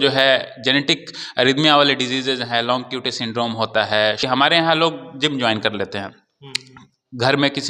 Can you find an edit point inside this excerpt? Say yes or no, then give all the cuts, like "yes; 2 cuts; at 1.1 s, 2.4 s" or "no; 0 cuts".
yes; 1 cut; at 4.2 s